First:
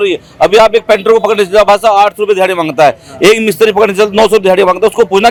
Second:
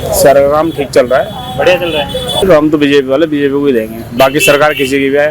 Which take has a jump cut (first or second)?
second